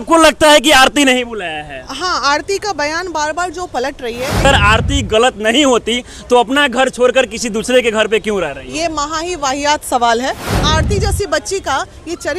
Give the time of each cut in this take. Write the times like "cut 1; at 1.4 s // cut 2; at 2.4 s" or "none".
cut 1; at 4.4 s // cut 2; at 10.6 s

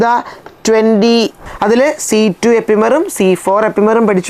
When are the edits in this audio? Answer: cut 1; at 1.4 s

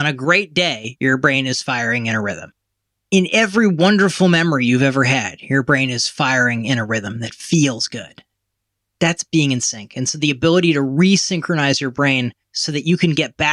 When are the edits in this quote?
cut 1; at 8.6 s // cut 2; at 12.5 s

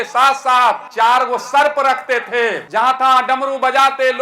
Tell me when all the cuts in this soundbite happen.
cut 1; at 0.9 s // cut 2; at 2.6 s

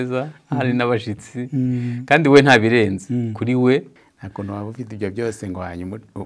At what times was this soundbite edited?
cut 1; at 4.0 s

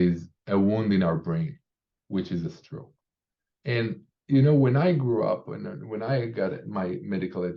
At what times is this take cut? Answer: none

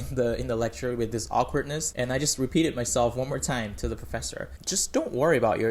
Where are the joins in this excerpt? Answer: cut 1; at 1.8 s // cut 2; at 4.6 s

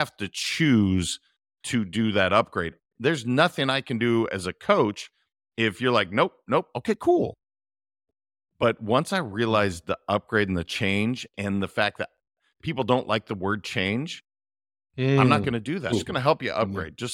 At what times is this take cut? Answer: cut 1; at 15.9 s

